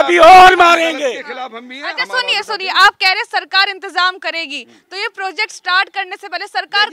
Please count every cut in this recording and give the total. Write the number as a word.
zero